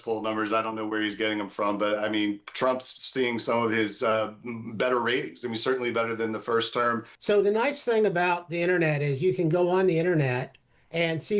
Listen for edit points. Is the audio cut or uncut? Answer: cut